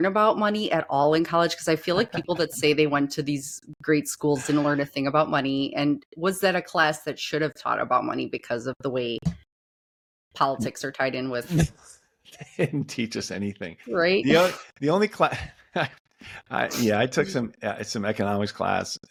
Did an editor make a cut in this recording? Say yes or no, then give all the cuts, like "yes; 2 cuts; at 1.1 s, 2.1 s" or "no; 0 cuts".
no; 0 cuts